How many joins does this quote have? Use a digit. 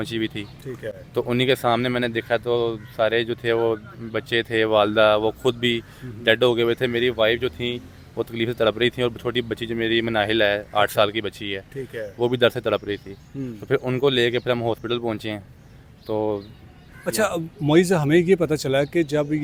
0